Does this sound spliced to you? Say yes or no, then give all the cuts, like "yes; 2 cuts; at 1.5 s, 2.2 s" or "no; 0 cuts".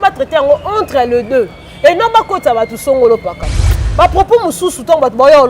yes; 1 cut; at 3.8 s